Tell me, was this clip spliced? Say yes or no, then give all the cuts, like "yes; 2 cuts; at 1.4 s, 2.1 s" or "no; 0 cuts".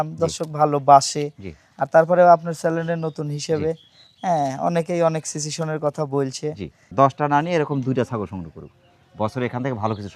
yes; 1 cut; at 6.8 s